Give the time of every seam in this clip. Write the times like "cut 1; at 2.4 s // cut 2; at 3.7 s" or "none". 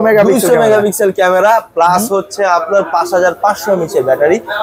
none

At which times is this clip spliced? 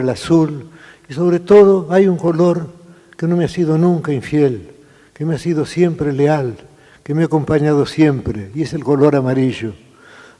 cut 1; at 1.3 s

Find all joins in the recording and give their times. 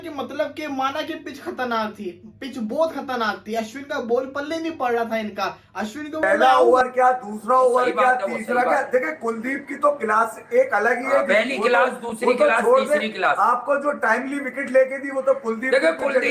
cut 1; at 6.3 s

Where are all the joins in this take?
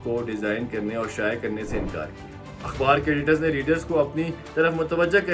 none

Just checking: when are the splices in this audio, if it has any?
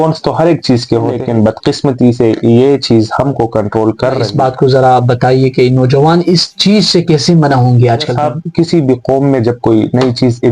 cut 1; at 1.2 s // cut 2; at 4.3 s // cut 3; at 8.1 s

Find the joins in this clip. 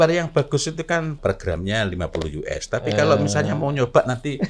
cut 1; at 1.2 s

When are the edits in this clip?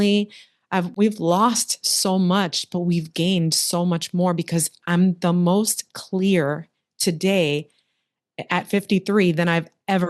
none

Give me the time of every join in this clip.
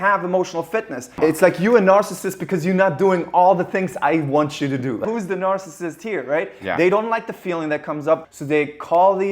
cut 1; at 1.2 s // cut 2; at 5.0 s // cut 3; at 8.2 s

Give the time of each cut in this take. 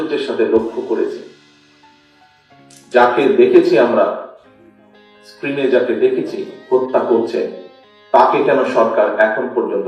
none

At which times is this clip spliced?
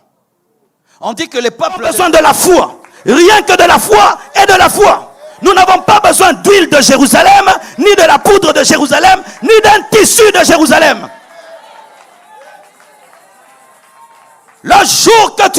cut 1; at 1.9 s

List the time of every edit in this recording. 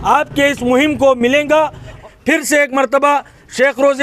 cut 1; at 2.0 s

